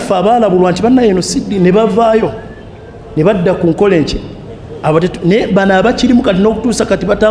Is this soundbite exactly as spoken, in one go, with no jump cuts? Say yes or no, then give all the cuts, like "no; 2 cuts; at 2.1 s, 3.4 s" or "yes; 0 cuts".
yes; 0 cuts